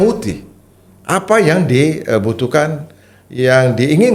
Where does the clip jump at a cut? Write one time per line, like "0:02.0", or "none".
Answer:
none